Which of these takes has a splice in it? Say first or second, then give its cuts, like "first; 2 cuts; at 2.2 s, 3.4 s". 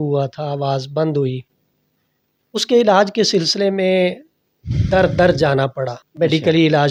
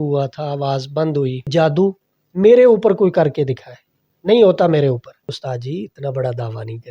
second; 2 cuts; at 1.5 s, 5.4 s